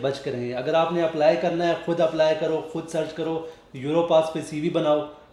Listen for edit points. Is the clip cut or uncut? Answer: uncut